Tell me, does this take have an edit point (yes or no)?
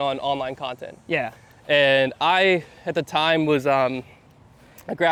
no